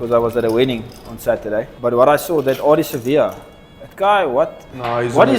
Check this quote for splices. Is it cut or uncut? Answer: cut